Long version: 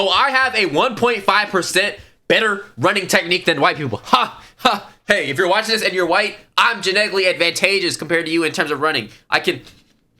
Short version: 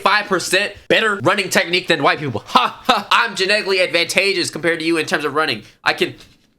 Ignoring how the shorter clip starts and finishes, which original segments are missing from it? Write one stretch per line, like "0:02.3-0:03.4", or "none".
0:02.2-0:02.6
0:04.5-0:06.4